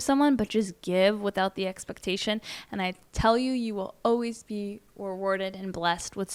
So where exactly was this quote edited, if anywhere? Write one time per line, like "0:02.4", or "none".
none